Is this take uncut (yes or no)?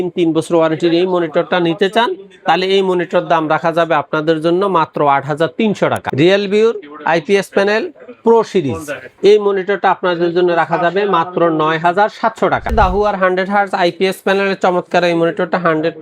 no